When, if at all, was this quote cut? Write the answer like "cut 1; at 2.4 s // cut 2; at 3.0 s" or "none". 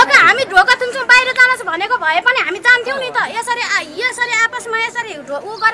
none